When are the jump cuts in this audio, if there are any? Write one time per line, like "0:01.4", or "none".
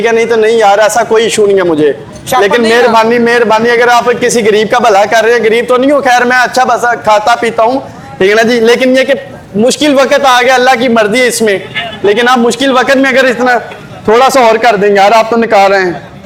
none